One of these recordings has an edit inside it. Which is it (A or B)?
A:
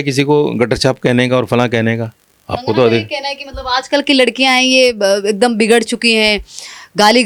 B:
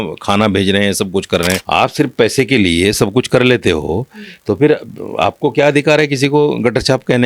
B